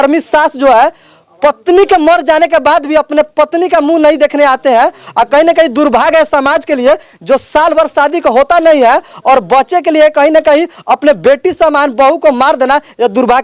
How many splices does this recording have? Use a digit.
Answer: 0